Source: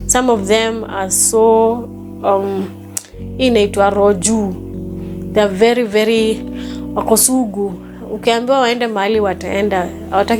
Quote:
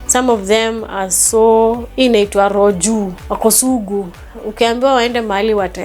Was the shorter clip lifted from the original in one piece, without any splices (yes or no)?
no